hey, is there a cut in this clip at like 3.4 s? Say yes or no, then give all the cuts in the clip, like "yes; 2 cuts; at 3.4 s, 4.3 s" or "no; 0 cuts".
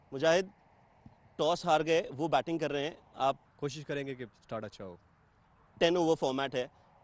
yes; 1 cut; at 3.4 s